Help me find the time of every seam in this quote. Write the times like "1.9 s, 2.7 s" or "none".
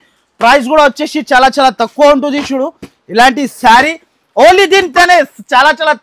4.9 s